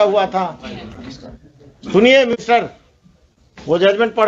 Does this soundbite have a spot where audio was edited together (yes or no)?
no